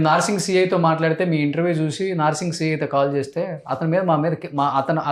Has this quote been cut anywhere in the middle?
no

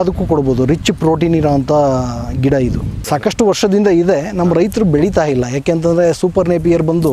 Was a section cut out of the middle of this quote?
yes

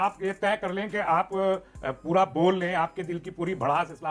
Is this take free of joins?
yes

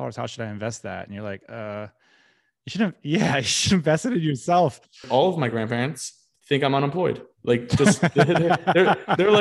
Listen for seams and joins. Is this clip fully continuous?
no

